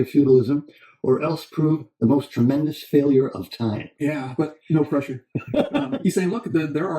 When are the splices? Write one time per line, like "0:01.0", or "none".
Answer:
0:05.9